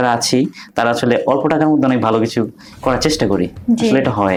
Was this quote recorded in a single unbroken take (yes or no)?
yes